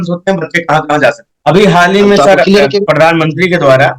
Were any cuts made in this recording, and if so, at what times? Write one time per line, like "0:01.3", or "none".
0:01.3